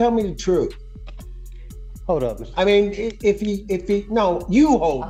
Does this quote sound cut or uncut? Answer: uncut